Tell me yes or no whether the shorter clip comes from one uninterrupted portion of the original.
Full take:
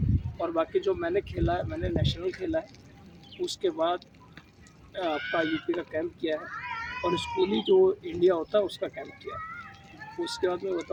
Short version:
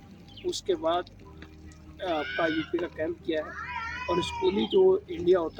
yes